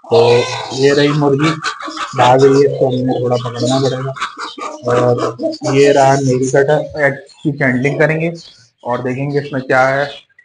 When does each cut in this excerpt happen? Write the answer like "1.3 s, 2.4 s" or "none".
7.0 s